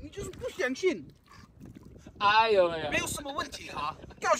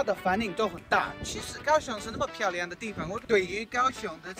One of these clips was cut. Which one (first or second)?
second